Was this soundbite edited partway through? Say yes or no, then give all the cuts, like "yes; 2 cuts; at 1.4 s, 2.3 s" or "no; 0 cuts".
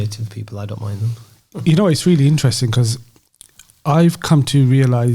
no; 0 cuts